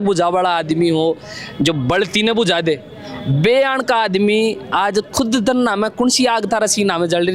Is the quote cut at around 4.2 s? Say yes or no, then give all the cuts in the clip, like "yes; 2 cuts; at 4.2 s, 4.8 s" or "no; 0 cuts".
no; 0 cuts